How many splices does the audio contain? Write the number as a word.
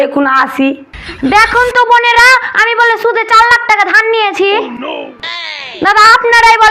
one